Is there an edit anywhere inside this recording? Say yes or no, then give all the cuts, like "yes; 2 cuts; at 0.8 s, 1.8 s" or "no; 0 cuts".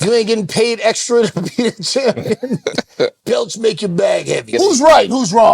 yes; 1 cut; at 4.5 s